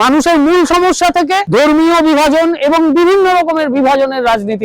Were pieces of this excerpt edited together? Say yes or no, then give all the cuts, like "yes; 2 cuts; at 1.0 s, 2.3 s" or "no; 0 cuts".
yes; 1 cut; at 1.4 s